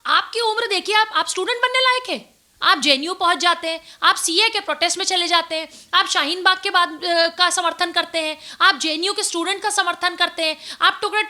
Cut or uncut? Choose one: uncut